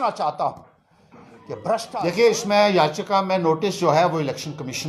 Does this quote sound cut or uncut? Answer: cut